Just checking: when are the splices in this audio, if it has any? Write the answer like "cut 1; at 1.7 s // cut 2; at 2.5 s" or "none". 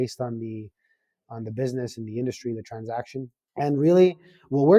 cut 1; at 3.4 s